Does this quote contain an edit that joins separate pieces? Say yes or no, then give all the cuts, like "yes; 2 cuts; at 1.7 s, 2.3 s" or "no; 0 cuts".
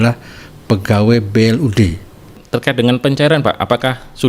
yes; 1 cut; at 2.4 s